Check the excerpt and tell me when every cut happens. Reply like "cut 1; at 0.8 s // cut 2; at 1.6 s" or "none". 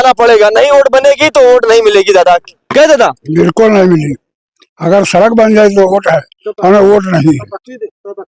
none